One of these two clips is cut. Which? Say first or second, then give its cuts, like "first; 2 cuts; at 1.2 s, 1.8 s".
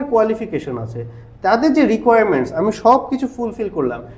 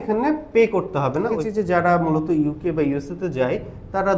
second; 1 cut; at 1.3 s